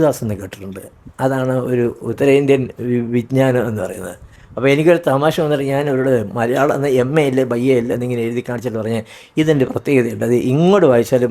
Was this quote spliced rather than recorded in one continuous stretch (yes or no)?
no